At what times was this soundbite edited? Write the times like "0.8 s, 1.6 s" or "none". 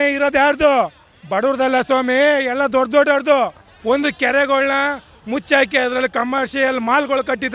3.7 s